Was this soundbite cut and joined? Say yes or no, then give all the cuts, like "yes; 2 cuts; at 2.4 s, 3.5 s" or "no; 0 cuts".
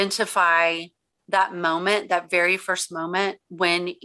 no; 0 cuts